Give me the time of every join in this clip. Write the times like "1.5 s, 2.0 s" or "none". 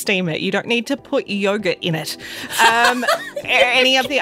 none